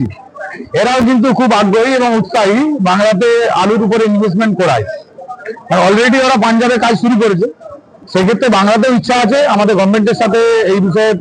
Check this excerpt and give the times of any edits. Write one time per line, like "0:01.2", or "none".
none